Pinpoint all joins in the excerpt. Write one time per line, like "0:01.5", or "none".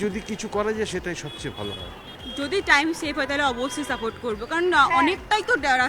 0:02.0